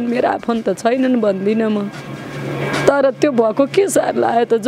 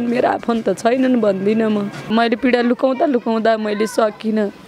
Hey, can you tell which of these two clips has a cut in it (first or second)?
second